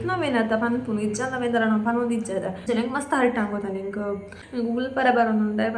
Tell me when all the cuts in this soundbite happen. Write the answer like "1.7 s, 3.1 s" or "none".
2.7 s, 4.4 s